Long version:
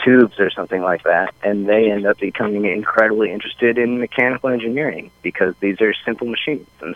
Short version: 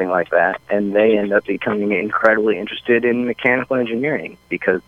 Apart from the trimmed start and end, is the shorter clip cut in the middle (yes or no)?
no